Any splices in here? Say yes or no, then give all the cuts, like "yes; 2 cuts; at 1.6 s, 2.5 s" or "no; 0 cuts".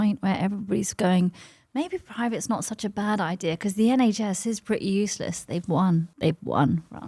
yes; 1 cut; at 6.1 s